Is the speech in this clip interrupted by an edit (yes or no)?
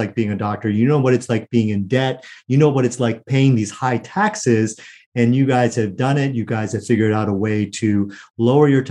no